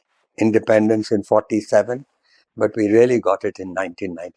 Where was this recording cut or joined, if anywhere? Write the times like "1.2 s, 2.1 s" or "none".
none